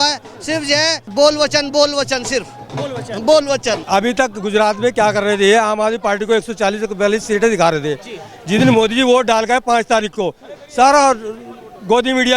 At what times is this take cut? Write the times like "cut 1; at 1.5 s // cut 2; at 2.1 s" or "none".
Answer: cut 1; at 1.0 s // cut 2; at 3.8 s